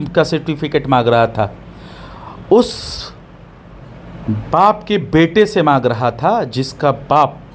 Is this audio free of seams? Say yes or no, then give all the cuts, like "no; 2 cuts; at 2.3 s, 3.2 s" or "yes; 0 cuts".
yes; 0 cuts